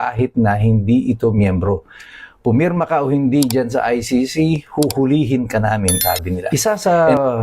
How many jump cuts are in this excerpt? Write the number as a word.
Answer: one